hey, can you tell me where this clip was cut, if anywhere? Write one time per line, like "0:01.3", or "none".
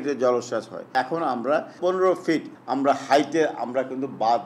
0:00.9
0:01.8
0:02.6